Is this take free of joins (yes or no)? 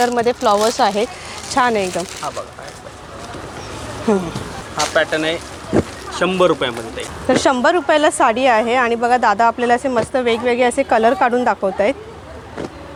yes